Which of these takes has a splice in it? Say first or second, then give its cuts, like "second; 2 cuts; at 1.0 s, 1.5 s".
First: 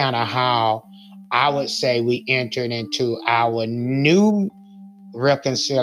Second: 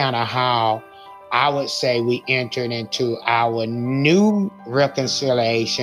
second; 1 cut; at 4.6 s